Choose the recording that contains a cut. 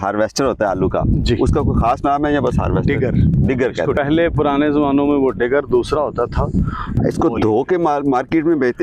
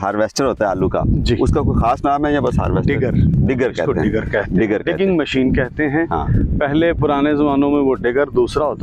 first; 2 cuts; at 3.9 s, 7.0 s

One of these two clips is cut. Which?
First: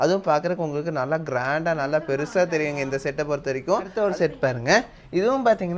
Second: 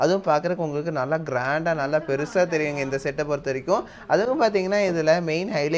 first; 1 cut; at 3.9 s

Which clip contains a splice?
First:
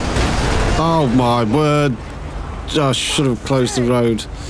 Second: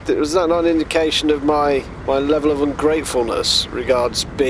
second; 1 cut; at 1.9 s

